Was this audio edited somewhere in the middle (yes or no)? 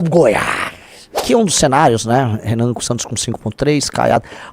yes